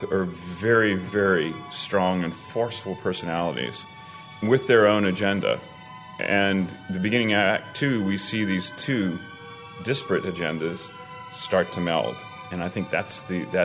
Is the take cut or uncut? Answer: uncut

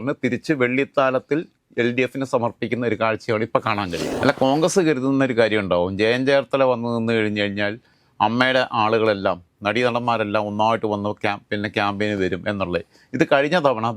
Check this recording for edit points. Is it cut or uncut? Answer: cut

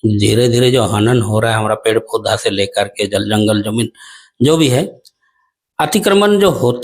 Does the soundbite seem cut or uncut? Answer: uncut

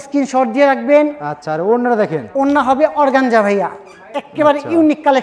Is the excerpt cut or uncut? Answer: uncut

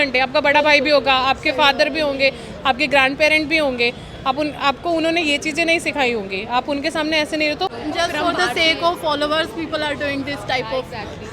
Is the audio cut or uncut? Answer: cut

